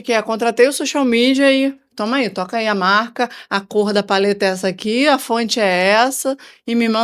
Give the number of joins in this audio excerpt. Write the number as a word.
zero